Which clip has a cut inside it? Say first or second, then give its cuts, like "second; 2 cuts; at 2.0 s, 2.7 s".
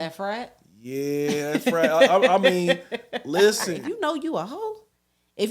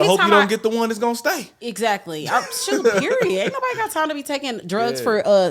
first; 1 cut; at 3.8 s